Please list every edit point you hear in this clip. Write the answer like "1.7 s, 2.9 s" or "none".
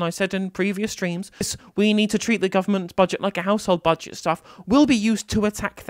1.5 s